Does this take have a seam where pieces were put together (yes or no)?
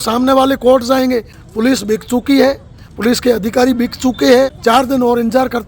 yes